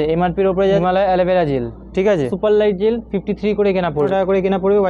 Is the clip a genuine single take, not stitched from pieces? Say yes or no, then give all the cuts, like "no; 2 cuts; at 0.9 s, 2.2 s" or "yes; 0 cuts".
no; 3 cuts; at 0.8 s, 2.3 s, 4.1 s